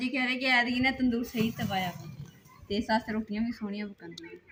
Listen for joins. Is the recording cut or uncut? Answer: uncut